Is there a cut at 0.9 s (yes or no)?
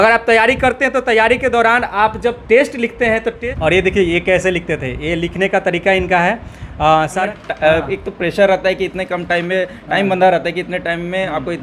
no